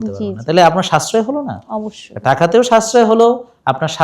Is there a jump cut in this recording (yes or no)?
no